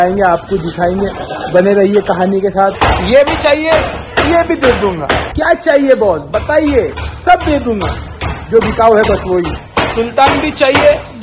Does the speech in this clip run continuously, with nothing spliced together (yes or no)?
no